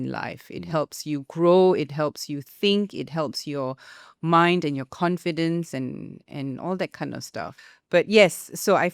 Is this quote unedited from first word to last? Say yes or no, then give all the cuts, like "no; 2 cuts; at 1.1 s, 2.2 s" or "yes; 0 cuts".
no; 1 cut; at 7.6 s